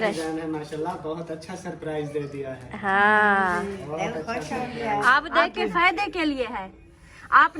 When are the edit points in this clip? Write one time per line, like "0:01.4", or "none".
0:05.5